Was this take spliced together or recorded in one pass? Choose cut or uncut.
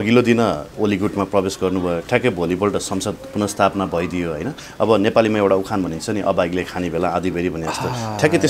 uncut